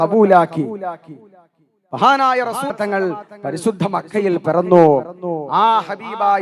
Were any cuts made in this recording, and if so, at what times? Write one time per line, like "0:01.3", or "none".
0:02.7